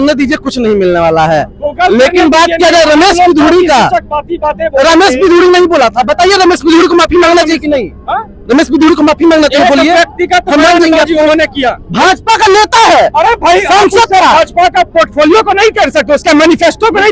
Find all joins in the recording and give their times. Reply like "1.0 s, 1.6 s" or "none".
none